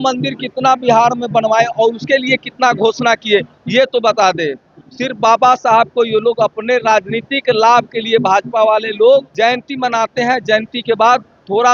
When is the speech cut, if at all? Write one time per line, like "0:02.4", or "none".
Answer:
0:09.3